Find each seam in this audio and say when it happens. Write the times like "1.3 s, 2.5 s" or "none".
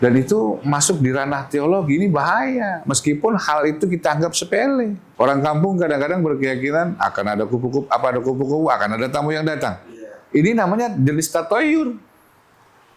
5.0 s